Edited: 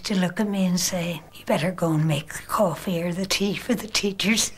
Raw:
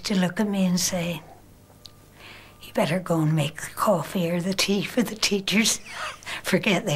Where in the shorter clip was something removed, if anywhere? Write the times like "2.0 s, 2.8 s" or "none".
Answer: 1.3 s